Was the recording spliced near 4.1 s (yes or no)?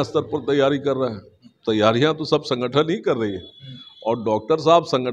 no